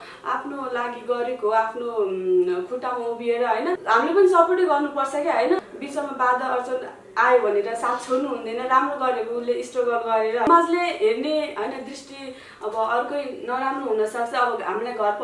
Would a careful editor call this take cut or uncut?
cut